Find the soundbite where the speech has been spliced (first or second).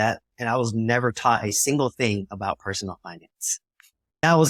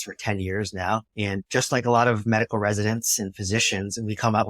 second